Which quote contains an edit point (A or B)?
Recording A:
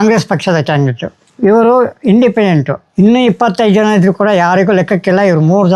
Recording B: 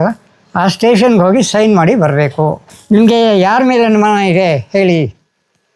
B